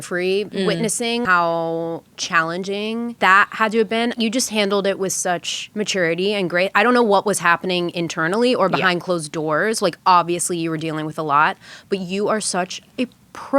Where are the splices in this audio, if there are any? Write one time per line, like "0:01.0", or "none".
0:01.0
0:03.2
0:04.1
0:05.6